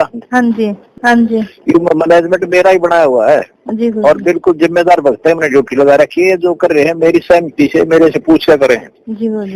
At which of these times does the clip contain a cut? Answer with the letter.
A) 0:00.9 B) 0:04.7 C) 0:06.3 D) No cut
A